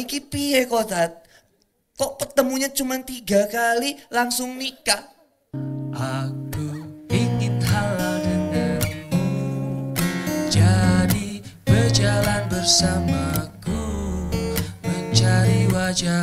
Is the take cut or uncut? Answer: cut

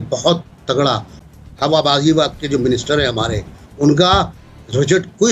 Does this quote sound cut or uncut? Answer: cut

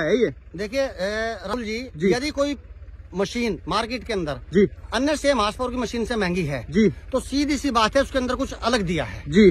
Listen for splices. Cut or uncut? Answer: cut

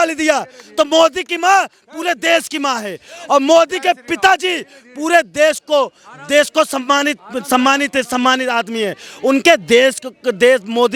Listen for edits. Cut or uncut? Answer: uncut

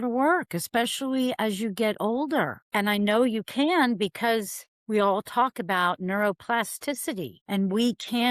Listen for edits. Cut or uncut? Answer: cut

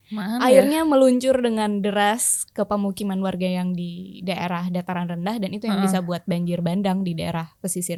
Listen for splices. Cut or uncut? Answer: uncut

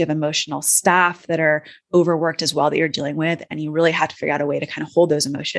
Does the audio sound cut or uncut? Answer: uncut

